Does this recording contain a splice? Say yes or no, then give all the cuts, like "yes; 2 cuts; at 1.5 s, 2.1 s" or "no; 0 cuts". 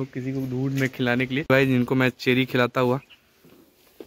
yes; 1 cut; at 1.4 s